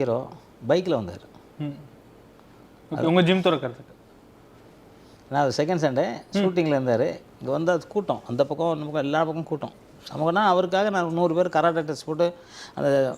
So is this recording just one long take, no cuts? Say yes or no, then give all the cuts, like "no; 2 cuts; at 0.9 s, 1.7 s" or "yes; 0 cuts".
yes; 0 cuts